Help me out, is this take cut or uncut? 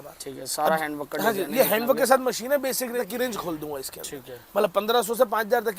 cut